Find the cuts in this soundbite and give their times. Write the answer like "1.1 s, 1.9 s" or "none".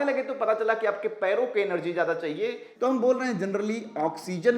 2.7 s